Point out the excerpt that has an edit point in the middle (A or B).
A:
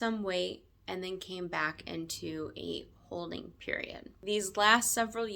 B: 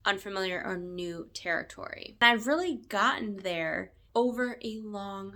A